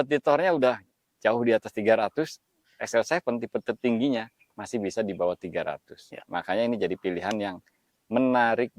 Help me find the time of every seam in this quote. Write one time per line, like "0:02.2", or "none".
none